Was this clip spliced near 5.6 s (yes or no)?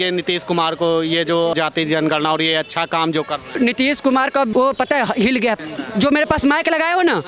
yes